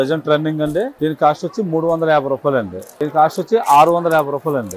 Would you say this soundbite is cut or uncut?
cut